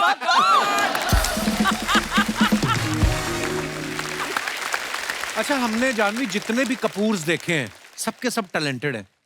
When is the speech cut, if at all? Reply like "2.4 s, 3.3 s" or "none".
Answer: 4.1 s, 5.3 s